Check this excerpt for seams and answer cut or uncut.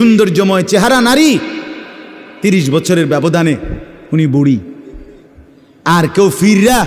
uncut